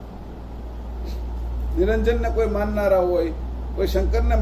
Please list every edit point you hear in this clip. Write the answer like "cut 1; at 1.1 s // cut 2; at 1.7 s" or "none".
none